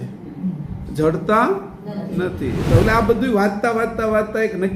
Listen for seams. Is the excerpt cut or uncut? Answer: cut